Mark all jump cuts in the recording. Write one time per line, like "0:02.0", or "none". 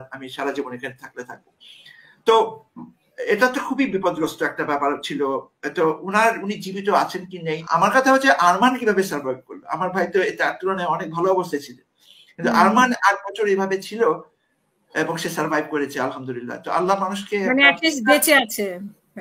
0:07.6